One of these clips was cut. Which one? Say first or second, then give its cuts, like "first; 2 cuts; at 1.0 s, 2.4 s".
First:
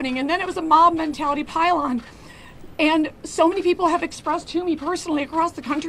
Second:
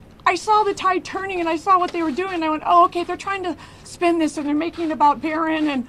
second; 1 cut; at 1.6 s